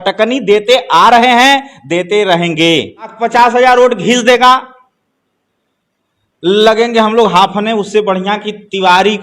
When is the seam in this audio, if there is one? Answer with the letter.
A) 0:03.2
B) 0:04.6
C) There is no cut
A